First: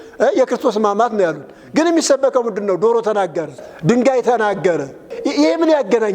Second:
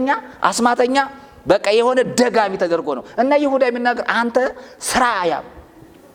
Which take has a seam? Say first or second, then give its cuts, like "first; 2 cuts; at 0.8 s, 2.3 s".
first; 2 cuts; at 3.6 s, 5.1 s